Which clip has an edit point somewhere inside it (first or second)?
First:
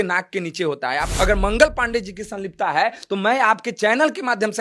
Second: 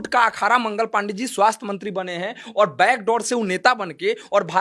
first